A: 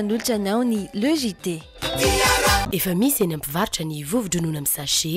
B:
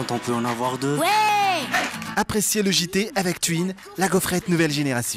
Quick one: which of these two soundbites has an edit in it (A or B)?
A